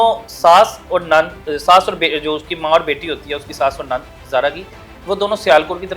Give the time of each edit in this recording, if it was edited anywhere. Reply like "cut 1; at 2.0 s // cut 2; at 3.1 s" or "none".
none